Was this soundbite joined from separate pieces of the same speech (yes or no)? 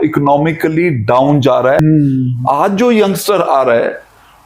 yes